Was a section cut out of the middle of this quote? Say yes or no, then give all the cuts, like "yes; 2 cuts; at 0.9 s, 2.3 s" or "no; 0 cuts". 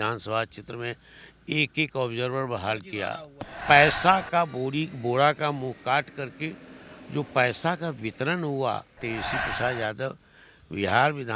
yes; 2 cuts; at 3.5 s, 8.9 s